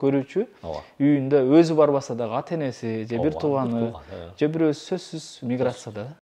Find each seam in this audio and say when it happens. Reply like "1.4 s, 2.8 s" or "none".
none